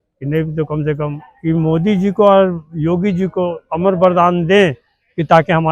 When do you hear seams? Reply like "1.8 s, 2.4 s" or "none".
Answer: 1.3 s